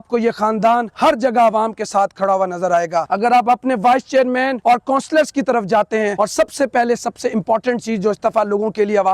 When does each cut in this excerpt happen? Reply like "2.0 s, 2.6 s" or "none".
0.9 s, 3.1 s, 4.6 s, 6.1 s

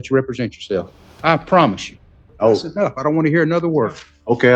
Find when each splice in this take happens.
1.0 s, 2.1 s

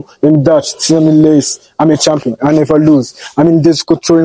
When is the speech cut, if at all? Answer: none

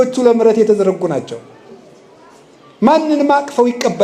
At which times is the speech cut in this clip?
none

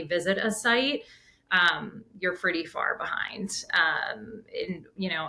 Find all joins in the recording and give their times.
none

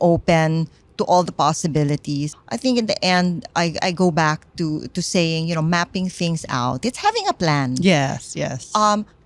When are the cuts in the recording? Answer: 2.4 s

